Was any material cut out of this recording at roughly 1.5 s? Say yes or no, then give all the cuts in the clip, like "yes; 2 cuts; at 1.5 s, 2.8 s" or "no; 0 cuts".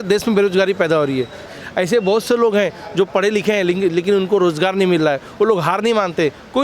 yes; 1 cut; at 1.5 s